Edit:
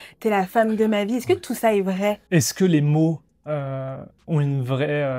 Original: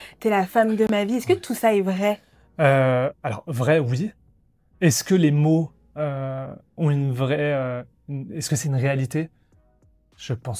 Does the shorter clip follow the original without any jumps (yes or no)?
no